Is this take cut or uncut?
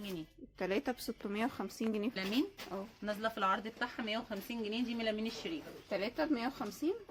cut